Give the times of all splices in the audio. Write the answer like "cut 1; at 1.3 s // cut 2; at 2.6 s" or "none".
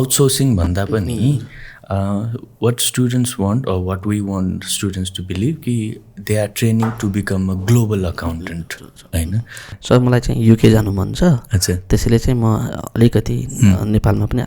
cut 1; at 9.7 s